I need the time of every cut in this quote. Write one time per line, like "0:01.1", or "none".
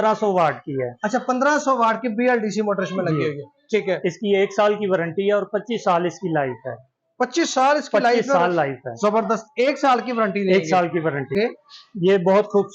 0:11.3